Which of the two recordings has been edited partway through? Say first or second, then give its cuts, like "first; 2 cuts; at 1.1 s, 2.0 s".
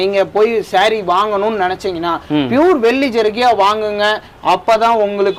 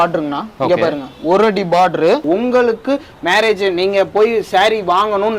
second; 1 cut; at 2.2 s